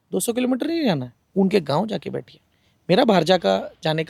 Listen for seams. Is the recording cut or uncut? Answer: uncut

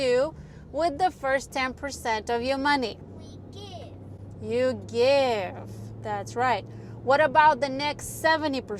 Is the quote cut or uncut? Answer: uncut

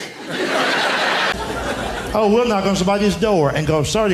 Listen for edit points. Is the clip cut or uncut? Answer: cut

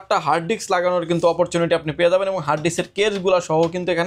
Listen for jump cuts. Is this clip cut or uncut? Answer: uncut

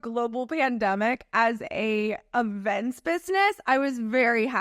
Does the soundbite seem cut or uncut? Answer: uncut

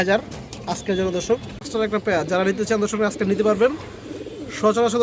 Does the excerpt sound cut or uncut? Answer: cut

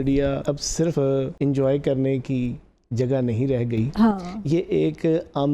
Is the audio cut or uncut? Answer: cut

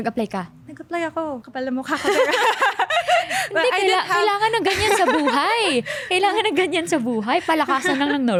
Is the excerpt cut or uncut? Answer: uncut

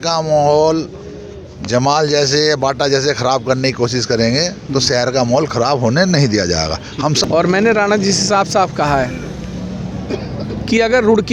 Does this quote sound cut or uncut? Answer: cut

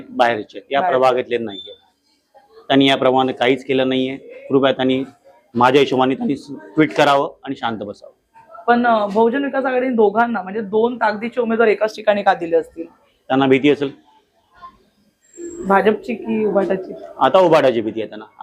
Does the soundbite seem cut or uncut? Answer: uncut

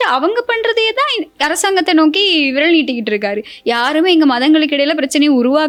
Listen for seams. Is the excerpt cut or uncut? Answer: uncut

